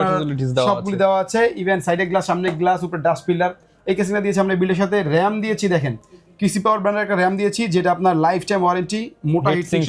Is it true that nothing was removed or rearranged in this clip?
yes; 0 cuts

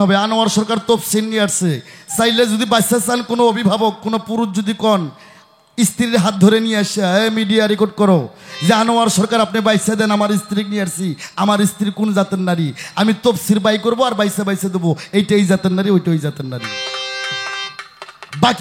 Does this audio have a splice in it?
no; 0 cuts

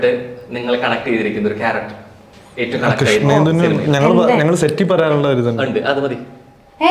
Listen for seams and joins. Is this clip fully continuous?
yes; 0 cuts

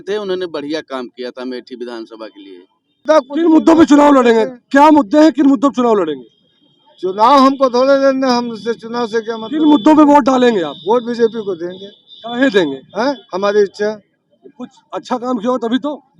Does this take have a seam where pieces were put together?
yes; 1 cut; at 3.0 s

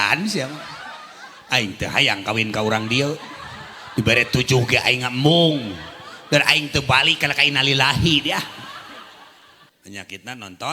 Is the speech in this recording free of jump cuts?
no; 1 cut; at 9.7 s

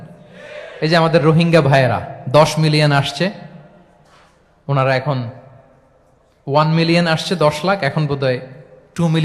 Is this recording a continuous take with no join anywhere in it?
yes; 0 cuts

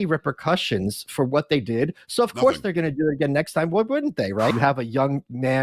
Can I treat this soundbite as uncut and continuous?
no; 1 cut; at 4.5 s

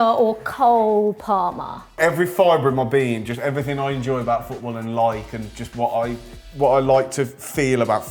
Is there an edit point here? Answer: yes; 1 cut; at 2.0 s

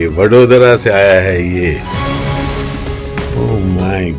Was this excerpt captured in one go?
yes; 0 cuts

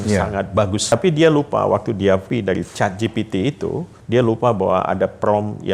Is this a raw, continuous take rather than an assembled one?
no; 3 cuts; at 0.9 s, 2.3 s, 3.9 s

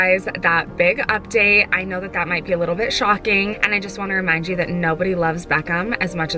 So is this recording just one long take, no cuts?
yes; 0 cuts

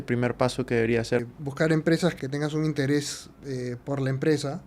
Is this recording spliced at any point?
yes; 2 cuts; at 1.2 s, 2.1 s

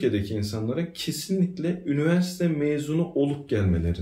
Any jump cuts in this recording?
no; 0 cuts

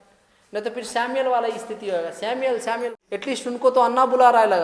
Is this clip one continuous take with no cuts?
no; 1 cut; at 3.0 s

